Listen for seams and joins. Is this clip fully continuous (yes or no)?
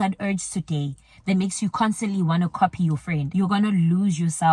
no